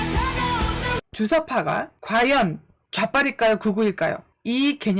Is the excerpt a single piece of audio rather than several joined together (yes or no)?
no